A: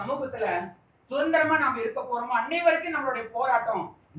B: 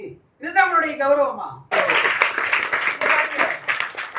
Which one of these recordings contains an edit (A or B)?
B